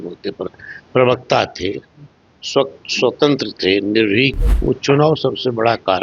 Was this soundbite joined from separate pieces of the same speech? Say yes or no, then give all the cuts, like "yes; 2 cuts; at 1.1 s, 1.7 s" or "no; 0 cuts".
yes; 1 cut; at 4.5 s